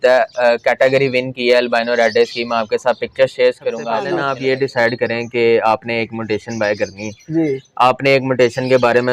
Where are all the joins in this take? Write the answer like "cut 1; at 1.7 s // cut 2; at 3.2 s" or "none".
cut 1; at 4.0 s